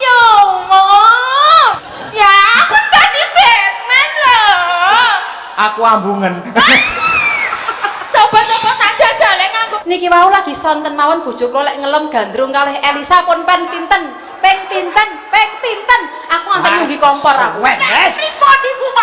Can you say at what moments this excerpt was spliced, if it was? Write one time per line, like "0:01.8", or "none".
0:01.7
0:09.8

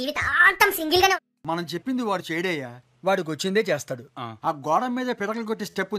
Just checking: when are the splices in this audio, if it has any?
0:01.4

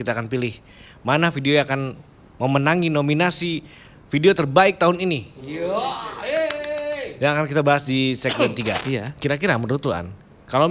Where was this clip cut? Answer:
0:08.8

